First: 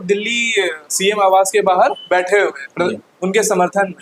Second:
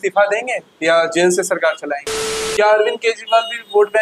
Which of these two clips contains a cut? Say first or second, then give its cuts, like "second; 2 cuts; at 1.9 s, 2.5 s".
second; 1 cut; at 2.4 s